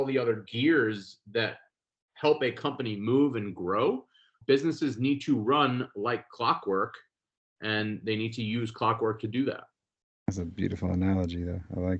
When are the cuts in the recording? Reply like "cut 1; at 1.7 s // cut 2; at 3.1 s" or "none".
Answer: cut 1; at 4.3 s